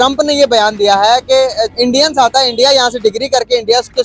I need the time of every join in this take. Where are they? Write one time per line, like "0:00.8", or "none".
0:01.7